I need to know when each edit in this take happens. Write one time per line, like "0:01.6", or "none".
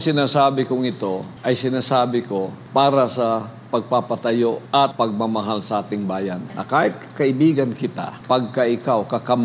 0:01.3
0:02.6
0:04.8
0:06.5
0:08.1